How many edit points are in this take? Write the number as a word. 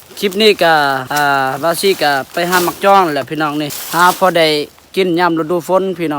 two